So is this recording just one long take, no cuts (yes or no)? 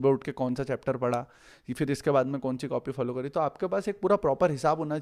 yes